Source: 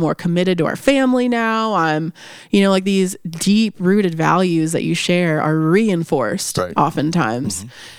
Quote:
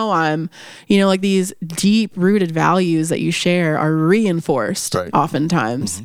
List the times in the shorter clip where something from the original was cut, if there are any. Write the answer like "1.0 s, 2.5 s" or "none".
none